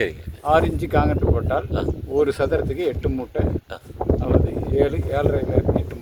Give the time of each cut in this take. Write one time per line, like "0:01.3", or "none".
none